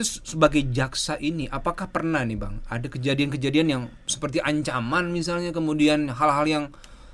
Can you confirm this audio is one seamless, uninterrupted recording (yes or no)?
yes